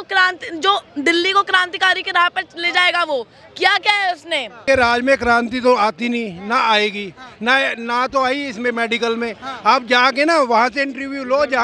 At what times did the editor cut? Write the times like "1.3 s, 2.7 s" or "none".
4.5 s